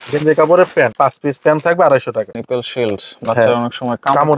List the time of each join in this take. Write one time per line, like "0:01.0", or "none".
0:00.9
0:02.3